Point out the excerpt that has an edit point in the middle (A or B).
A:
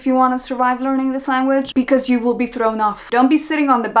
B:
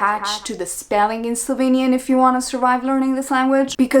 A